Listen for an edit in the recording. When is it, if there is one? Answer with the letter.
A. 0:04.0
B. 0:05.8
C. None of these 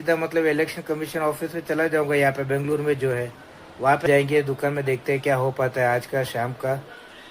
A